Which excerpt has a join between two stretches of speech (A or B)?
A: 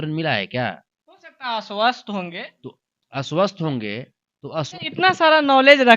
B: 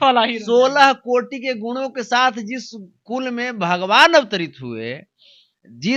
A